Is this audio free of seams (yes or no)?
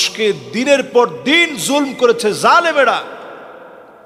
yes